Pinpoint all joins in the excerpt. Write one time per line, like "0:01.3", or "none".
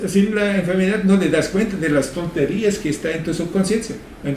none